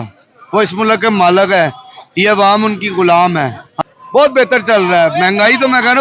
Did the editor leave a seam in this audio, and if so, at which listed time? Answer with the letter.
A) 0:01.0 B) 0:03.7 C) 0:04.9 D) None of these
B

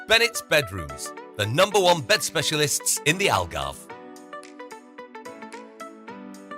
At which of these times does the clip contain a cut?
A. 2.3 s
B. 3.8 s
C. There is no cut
B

